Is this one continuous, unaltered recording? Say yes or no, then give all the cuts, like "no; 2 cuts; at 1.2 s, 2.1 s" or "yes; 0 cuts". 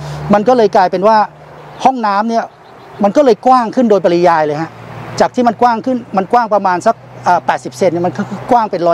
yes; 0 cuts